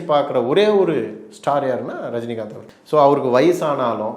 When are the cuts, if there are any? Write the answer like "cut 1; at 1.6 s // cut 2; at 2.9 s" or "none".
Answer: cut 1; at 2.6 s